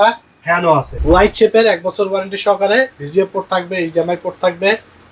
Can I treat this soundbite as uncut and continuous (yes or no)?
no